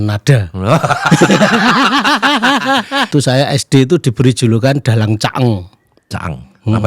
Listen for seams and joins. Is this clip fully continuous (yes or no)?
no